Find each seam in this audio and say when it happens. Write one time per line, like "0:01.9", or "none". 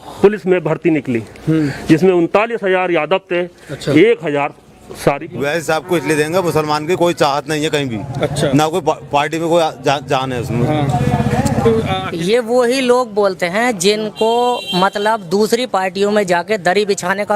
0:05.2
0:12.1